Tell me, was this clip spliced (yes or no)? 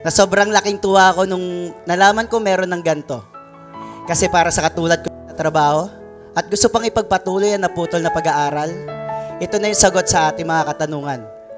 no